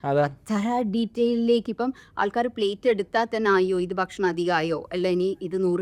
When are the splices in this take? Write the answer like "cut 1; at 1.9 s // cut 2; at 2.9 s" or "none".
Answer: none